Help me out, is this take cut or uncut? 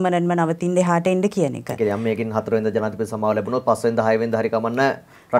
uncut